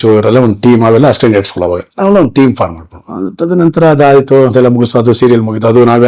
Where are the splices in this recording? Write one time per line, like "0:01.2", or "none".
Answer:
0:01.9